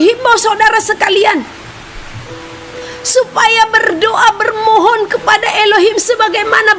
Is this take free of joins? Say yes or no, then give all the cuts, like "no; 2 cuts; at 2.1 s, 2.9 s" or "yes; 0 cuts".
yes; 0 cuts